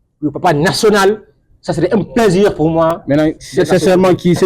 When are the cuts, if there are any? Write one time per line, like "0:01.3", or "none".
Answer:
none